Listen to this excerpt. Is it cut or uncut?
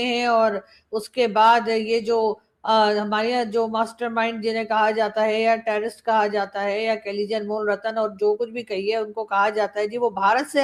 uncut